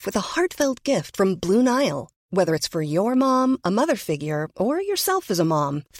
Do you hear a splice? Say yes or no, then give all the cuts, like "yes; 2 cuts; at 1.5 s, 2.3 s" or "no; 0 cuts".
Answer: no; 0 cuts